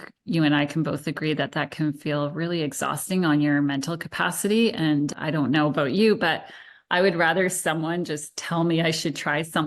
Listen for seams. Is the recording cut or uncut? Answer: uncut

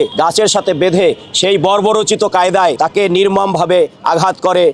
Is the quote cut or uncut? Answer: uncut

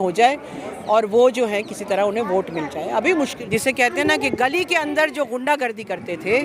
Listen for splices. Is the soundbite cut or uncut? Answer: cut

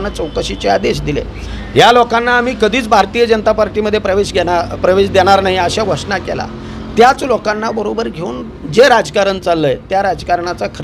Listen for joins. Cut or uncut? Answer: uncut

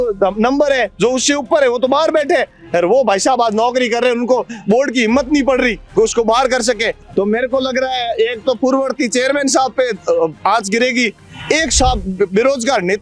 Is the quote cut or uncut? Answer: cut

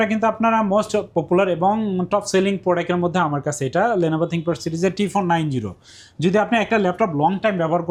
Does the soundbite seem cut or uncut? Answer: uncut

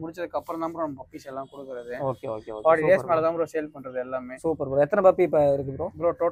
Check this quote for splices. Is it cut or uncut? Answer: uncut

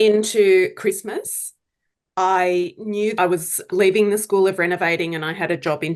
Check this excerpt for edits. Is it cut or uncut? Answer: cut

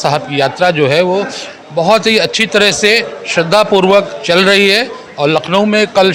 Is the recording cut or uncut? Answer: uncut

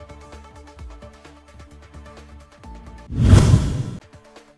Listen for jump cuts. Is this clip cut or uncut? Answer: uncut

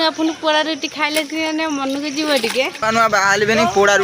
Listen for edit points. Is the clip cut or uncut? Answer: uncut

